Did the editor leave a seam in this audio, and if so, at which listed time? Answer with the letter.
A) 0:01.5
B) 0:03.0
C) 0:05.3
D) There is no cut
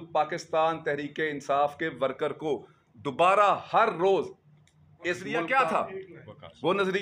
C